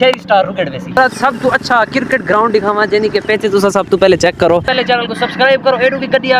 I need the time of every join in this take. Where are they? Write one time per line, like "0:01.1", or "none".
0:01.0
0:04.7